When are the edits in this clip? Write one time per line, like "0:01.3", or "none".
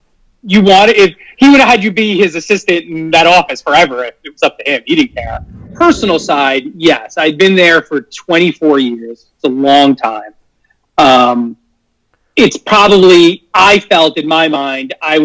0:05.7